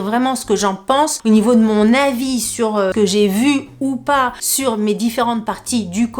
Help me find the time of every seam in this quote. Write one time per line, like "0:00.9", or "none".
0:01.2
0:02.9
0:04.4